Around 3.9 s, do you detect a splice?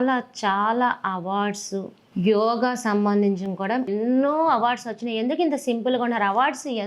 yes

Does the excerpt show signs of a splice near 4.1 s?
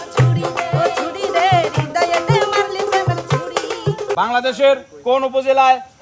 yes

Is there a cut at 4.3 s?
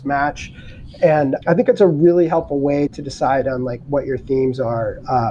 no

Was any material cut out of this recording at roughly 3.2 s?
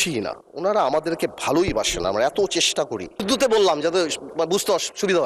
yes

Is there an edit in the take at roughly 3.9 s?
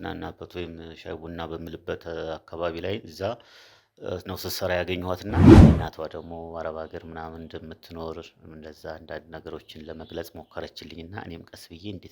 no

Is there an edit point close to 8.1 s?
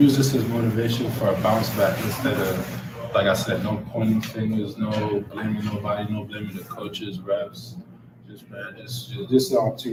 no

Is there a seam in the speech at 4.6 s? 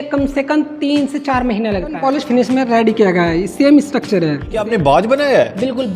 yes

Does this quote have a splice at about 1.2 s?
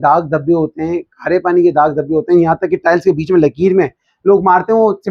no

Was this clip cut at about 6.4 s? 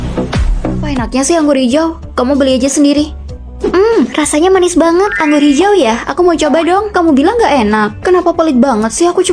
no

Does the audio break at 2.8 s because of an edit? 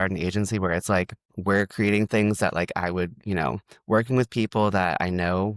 no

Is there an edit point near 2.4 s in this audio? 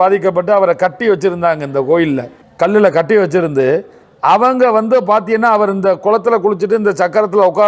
yes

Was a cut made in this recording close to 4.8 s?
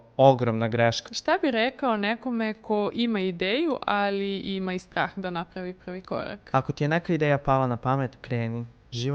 no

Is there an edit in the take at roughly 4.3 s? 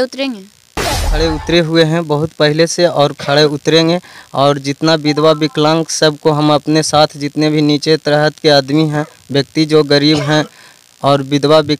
no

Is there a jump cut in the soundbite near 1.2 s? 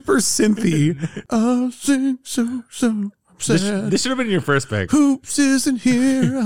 yes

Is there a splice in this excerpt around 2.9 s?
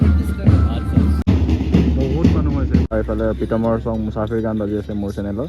yes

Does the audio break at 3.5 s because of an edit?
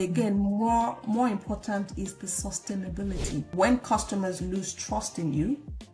yes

